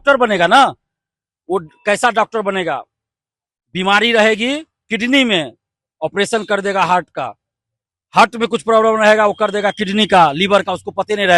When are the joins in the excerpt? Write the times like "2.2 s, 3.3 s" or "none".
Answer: none